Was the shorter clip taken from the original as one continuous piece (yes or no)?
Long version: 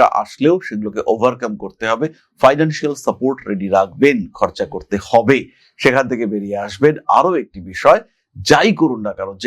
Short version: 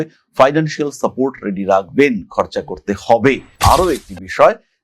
no